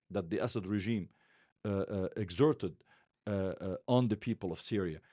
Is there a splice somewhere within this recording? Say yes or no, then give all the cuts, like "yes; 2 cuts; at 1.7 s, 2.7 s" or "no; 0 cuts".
no; 0 cuts